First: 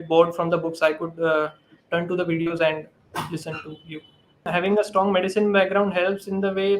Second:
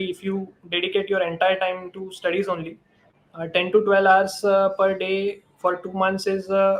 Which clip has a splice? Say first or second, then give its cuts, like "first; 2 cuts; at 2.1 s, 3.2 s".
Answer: first; 1 cut; at 4.5 s